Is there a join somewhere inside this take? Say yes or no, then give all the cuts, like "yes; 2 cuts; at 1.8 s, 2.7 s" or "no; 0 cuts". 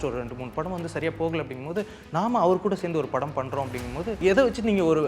yes; 1 cut; at 4.2 s